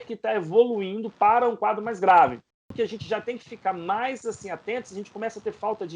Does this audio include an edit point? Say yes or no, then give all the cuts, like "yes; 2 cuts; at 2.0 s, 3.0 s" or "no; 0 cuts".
yes; 1 cut; at 2.7 s